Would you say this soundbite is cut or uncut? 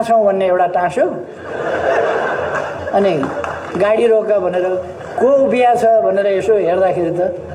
uncut